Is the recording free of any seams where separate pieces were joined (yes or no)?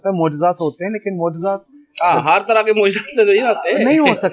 yes